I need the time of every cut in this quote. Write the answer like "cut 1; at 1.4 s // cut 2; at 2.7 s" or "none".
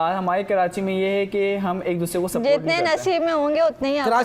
none